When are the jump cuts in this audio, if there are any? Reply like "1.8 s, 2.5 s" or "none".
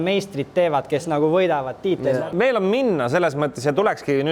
2.2 s